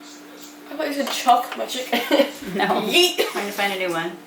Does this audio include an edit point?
yes; 1 cut; at 3.3 s

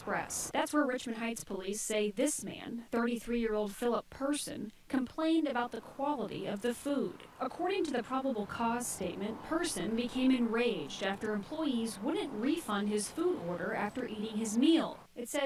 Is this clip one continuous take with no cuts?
yes; 0 cuts

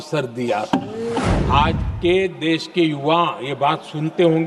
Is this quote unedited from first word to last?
no; 1 cut; at 1.3 s

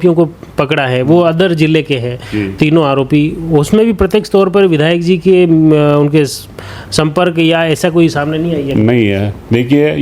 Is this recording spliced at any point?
no; 0 cuts

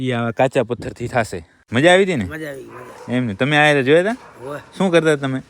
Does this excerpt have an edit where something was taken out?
yes; 1 cut; at 1.6 s

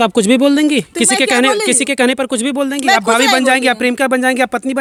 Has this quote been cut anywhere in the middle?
no; 0 cuts

